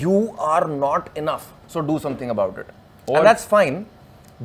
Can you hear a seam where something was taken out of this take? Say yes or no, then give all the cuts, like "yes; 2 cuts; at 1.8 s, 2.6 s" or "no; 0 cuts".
no; 0 cuts